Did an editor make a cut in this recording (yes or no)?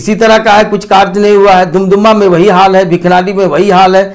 no